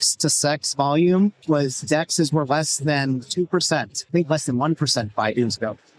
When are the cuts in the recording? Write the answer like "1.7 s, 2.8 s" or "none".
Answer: 1.4 s, 4.0 s